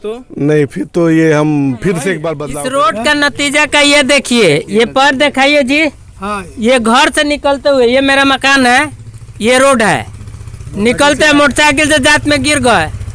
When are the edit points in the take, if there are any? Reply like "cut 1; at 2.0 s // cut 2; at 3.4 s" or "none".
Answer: cut 1; at 2.4 s